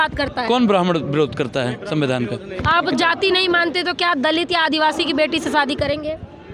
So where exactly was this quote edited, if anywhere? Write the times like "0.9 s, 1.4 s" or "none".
2.5 s